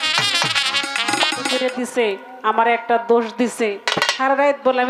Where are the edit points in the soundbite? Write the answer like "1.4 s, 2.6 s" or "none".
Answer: 1.5 s